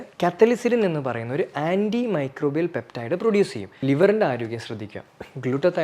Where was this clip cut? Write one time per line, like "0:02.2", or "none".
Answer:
0:03.7